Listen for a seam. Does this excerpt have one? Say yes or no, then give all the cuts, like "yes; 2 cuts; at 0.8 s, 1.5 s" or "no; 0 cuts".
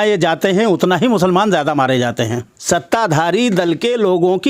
yes; 1 cut; at 2.5 s